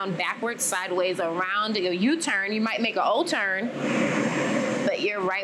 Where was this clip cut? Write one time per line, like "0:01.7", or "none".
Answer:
none